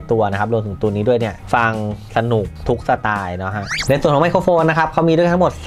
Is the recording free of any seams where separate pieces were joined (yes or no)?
no